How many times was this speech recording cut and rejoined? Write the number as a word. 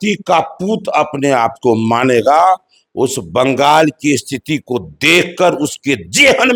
zero